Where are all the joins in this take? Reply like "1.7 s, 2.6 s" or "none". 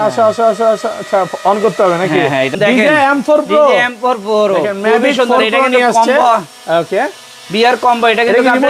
2.5 s